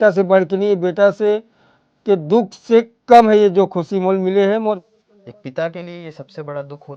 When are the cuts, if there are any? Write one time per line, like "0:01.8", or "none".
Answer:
0:04.8